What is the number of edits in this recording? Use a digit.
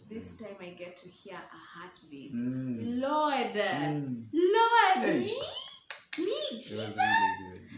0